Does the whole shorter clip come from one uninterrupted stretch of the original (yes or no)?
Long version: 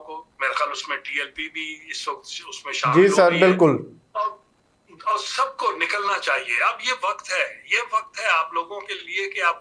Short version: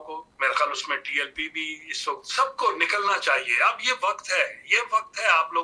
no